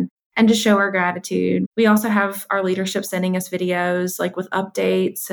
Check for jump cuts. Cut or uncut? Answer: cut